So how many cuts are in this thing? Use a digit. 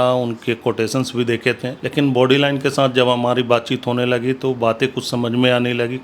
1